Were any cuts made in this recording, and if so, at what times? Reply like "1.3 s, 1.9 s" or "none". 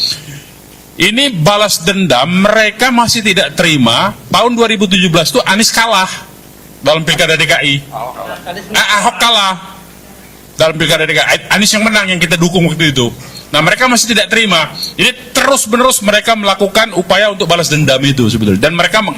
none